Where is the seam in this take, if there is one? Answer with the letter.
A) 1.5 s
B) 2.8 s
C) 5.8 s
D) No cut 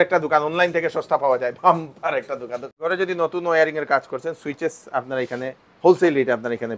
B